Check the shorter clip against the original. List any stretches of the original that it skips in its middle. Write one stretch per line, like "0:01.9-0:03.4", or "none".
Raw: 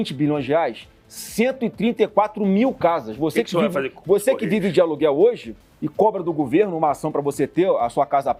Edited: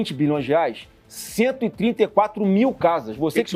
none